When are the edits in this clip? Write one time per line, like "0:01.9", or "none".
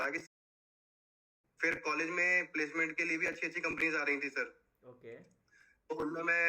0:00.9